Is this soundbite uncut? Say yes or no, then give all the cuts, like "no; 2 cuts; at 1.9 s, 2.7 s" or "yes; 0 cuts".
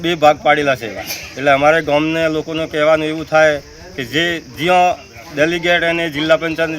yes; 0 cuts